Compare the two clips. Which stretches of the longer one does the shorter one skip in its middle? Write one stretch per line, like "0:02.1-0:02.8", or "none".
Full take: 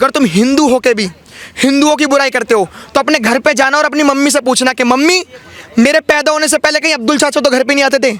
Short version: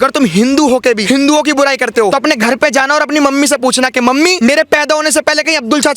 0:01.0-0:01.5
0:02.6-0:02.9
0:05.2-0:05.7